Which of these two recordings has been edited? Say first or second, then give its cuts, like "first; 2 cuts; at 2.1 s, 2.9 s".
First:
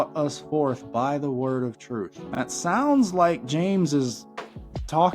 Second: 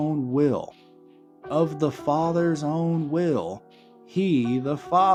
first; 1 cut; at 2.2 s